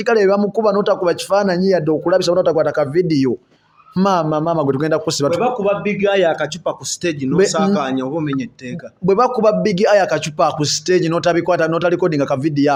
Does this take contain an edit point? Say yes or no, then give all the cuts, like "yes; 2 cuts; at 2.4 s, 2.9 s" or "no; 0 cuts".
no; 0 cuts